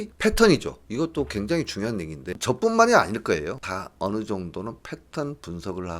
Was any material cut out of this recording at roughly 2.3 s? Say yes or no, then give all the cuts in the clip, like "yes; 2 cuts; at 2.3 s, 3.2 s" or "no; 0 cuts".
yes; 2 cuts; at 2.3 s, 3.6 s